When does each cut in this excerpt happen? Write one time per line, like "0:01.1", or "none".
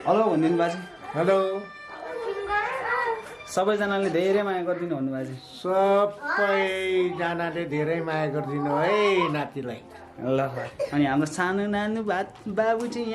0:10.6

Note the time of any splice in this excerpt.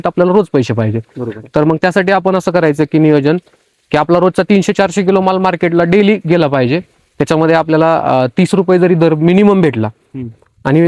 none

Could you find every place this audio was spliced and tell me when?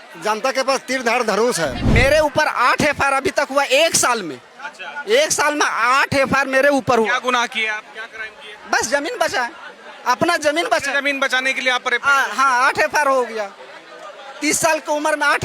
0:01.8

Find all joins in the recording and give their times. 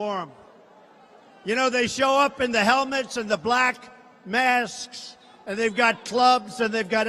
0:01.9

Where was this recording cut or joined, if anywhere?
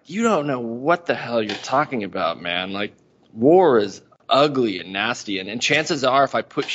none

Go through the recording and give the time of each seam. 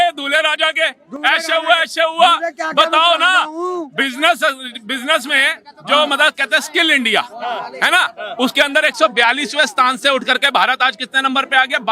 none

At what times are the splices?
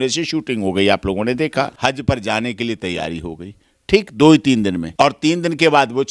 0:01.7
0:04.8

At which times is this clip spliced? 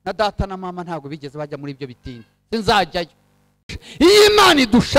0:03.8

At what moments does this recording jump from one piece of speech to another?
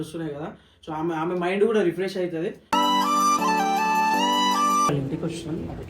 0:04.9

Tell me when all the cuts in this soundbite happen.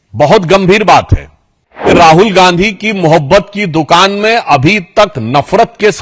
0:01.9

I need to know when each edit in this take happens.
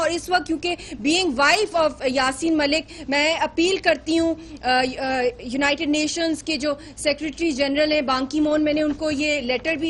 0:07.3

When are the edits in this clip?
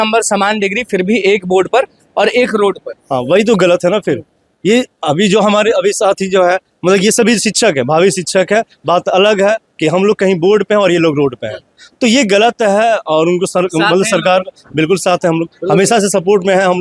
none

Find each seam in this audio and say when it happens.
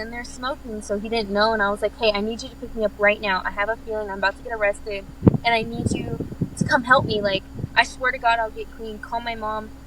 none

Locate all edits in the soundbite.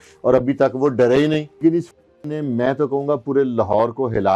0:01.6

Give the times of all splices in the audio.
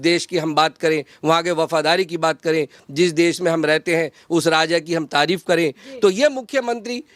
none

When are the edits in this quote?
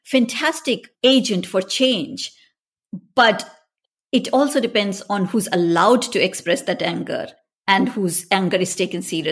none

